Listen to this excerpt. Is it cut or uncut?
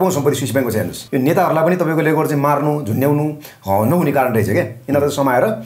cut